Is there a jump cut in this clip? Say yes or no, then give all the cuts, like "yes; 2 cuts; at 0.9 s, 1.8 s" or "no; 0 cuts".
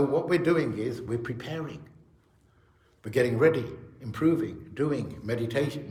no; 0 cuts